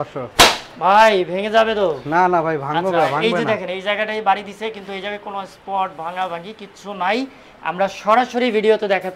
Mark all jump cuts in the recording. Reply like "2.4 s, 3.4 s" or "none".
none